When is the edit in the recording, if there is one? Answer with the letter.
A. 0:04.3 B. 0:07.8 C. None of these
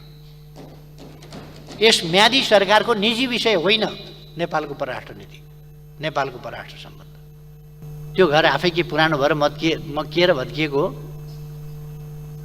B